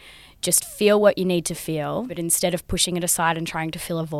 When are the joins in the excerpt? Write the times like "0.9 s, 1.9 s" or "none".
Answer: 2.1 s